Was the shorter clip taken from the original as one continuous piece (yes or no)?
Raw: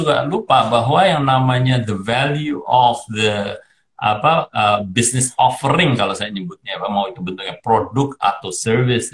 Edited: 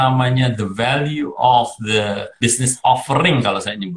no